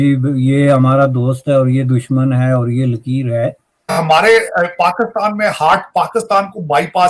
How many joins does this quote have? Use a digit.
1